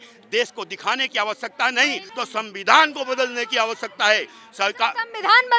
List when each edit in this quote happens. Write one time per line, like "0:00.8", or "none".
0:02.1